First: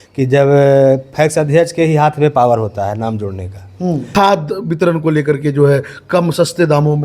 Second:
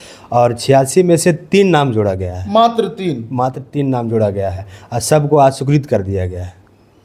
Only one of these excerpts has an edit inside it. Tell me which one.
first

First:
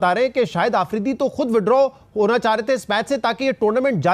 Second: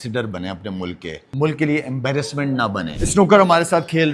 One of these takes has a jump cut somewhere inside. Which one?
second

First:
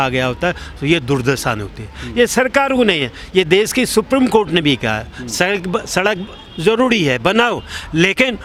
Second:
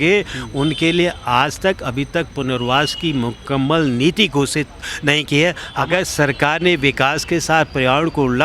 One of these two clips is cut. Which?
second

